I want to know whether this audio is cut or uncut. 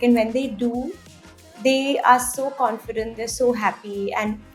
uncut